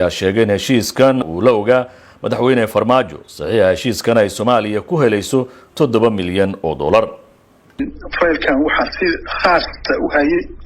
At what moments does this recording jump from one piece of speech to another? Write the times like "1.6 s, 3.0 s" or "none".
1.2 s